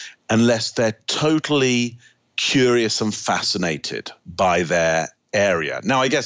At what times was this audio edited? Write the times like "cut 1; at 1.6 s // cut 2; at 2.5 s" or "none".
none